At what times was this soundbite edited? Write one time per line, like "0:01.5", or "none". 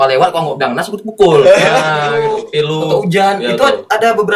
0:02.2